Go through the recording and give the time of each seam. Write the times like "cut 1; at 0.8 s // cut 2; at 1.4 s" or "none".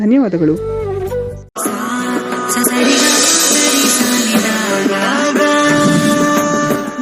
cut 1; at 1.2 s

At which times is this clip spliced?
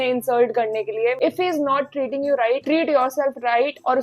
cut 1; at 1.2 s

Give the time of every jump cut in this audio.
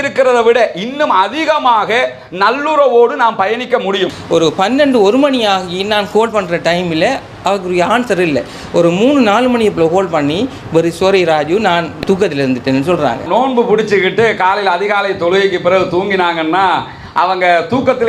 cut 1; at 4.1 s // cut 2; at 13.3 s

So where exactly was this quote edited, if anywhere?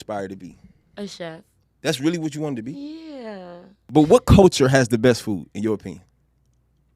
cut 1; at 3.8 s

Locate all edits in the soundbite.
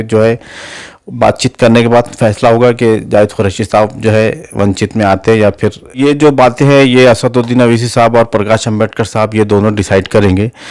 cut 1; at 5.9 s

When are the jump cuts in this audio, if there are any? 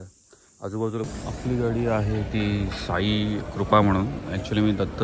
cut 1; at 1.1 s

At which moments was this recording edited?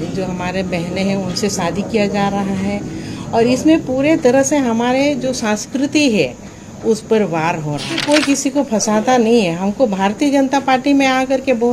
cut 1; at 8.0 s

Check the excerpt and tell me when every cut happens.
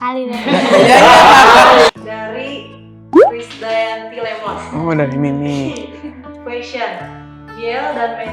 cut 1; at 1.9 s

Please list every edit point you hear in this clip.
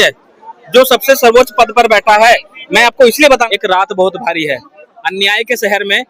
cut 1; at 3.4 s

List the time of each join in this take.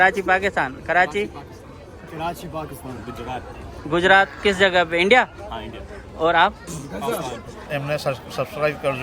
cut 1; at 7.7 s

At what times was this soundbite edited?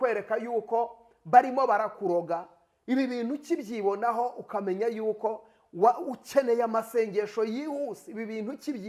none

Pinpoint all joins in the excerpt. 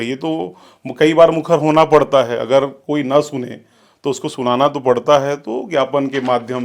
none

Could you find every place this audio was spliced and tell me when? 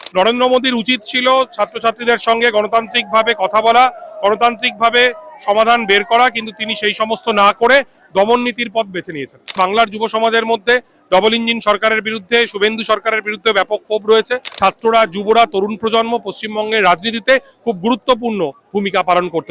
cut 1; at 9.5 s // cut 2; at 14.5 s

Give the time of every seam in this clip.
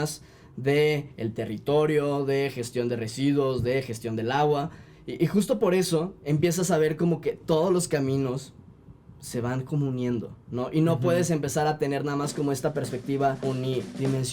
cut 1; at 13.4 s

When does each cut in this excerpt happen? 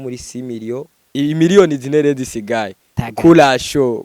cut 1; at 1.0 s

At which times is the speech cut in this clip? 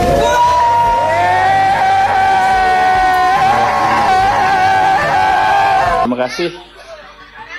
cut 1; at 6.1 s

